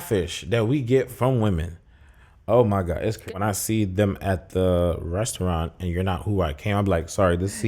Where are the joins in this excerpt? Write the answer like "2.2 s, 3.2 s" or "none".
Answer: 3.3 s